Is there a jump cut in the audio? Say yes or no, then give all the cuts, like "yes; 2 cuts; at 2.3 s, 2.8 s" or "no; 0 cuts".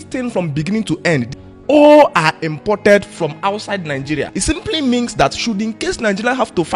yes; 2 cuts; at 1.4 s, 4.3 s